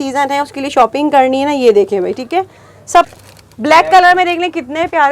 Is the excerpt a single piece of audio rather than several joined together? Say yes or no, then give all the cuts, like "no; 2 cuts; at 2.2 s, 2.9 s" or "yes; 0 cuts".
no; 1 cut; at 3.1 s